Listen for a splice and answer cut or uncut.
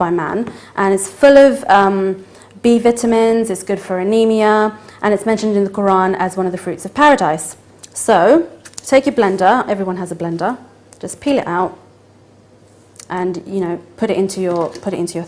uncut